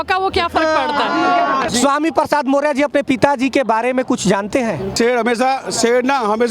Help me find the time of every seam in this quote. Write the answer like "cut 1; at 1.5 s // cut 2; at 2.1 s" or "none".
cut 1; at 1.7 s // cut 2; at 4.9 s

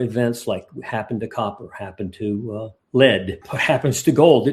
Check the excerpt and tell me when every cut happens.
cut 1; at 3.4 s

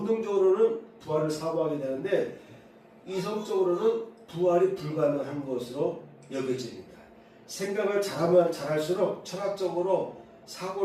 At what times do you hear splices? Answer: cut 1; at 1.0 s

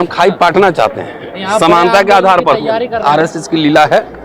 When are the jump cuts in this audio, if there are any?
cut 1; at 3.0 s

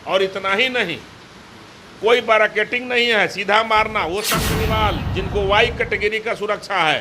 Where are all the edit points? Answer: cut 1; at 4.4 s

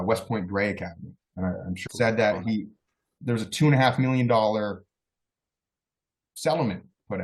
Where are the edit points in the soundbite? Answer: cut 1; at 1.8 s

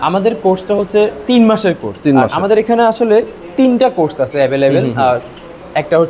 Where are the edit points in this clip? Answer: none

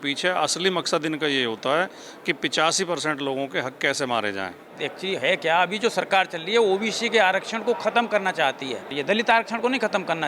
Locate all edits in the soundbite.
cut 1; at 4.8 s // cut 2; at 9.0 s

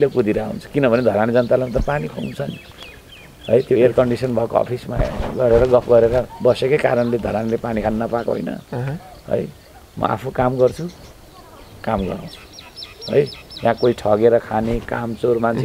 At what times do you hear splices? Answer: none

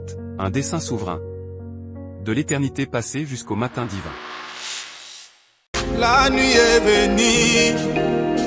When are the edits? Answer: cut 1; at 5.6 s

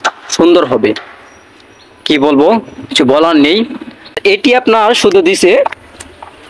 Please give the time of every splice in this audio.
cut 1; at 4.2 s

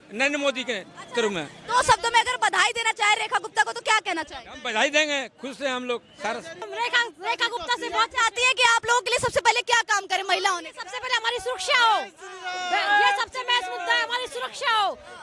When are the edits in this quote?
cut 1; at 6.6 s

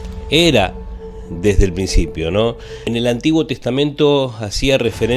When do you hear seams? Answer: cut 1; at 2.8 s

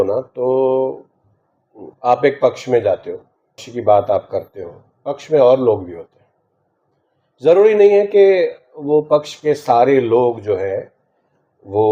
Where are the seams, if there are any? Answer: cut 1; at 3.7 s

